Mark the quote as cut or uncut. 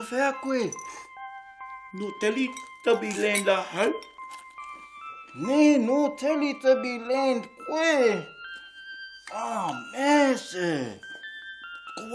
uncut